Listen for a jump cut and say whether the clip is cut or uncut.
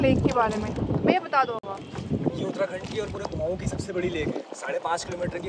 uncut